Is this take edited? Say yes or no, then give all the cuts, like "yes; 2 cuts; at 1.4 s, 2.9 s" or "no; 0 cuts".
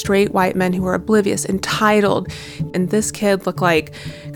yes; 1 cut; at 2.7 s